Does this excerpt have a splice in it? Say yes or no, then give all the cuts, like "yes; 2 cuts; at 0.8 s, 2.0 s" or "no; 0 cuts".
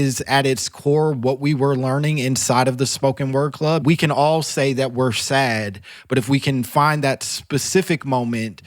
yes; 1 cut; at 3.8 s